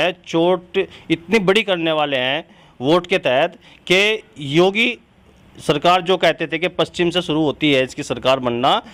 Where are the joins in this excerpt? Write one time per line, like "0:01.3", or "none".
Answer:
none